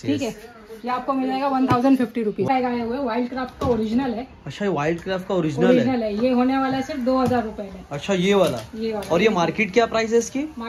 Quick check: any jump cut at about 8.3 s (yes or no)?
no